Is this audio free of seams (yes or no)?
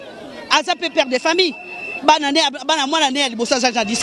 yes